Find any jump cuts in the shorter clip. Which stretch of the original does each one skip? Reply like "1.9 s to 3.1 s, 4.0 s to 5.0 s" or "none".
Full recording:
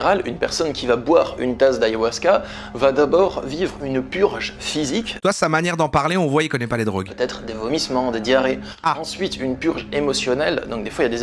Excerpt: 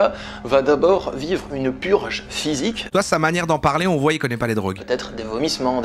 none

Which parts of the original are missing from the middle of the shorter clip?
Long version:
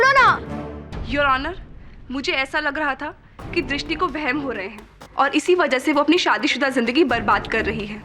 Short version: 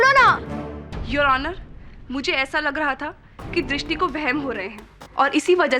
none

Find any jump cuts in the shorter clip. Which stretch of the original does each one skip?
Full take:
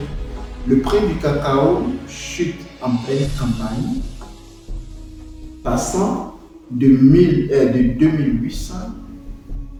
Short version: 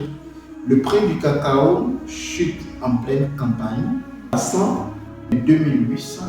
4.3 s to 5.7 s, 6.7 s to 7.9 s

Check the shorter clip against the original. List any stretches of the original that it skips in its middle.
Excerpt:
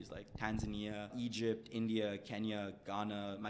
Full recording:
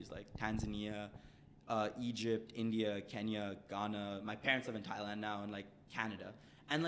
1.1 s to 1.9 s

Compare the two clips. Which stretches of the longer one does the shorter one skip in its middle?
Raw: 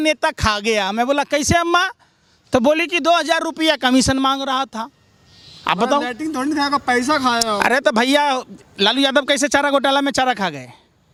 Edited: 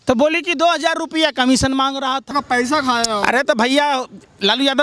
4.8 s to 6.7 s

